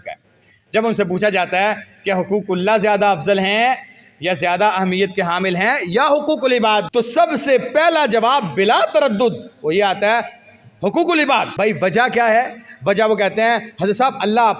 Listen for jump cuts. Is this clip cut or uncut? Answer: cut